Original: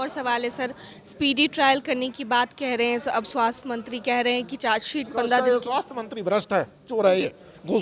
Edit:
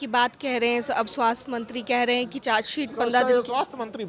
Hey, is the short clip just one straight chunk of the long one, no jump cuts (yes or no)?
yes